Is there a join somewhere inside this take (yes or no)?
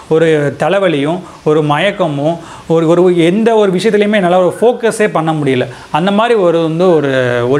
no